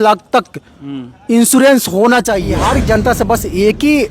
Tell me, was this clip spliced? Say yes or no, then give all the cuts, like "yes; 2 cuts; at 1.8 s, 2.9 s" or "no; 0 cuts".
yes; 1 cut; at 2.5 s